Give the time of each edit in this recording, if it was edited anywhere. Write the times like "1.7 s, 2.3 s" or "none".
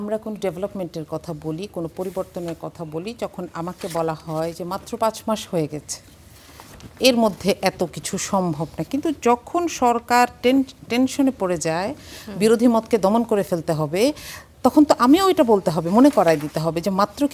none